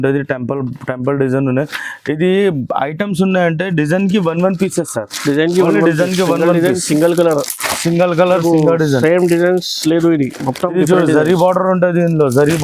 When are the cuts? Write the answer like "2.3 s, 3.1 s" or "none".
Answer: none